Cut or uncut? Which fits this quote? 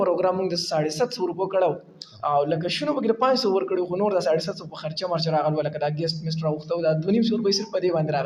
uncut